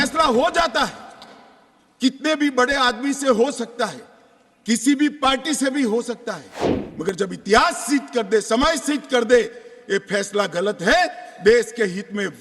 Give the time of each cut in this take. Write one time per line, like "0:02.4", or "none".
none